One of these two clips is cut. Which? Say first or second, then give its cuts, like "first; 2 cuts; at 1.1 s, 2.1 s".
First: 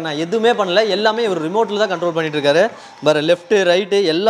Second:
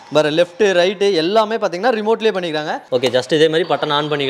second; 1 cut; at 2.8 s